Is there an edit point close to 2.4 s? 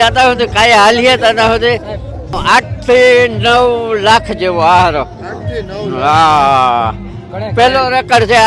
yes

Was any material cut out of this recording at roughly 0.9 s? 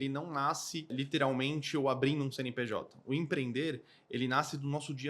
yes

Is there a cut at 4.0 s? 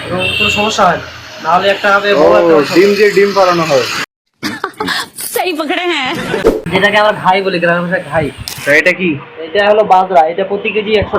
no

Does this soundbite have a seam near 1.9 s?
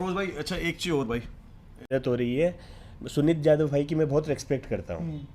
yes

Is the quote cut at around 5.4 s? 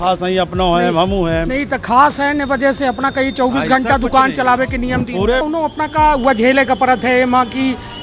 yes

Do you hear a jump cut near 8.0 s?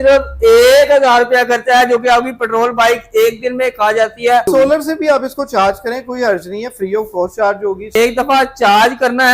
yes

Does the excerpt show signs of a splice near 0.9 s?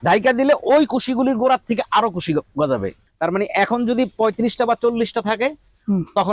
no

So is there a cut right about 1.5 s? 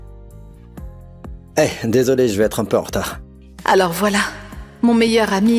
yes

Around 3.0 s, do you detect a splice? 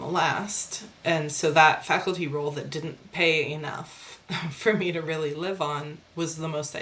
no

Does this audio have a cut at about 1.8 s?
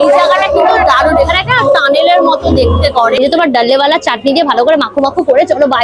no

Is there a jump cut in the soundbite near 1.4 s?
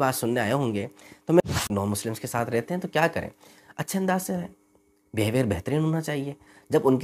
yes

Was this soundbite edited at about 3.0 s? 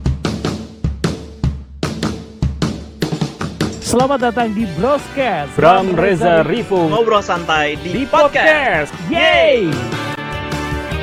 no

